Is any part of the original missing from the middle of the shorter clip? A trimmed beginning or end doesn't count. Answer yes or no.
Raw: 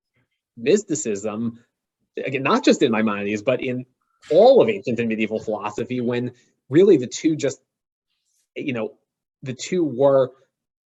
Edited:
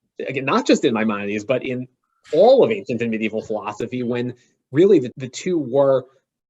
yes